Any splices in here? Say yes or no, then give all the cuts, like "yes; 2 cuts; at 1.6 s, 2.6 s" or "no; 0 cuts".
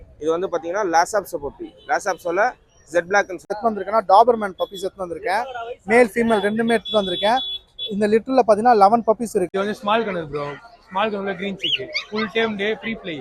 yes; 2 cuts; at 3.5 s, 9.5 s